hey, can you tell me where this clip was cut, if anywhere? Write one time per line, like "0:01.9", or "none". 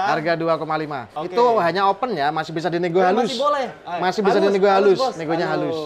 none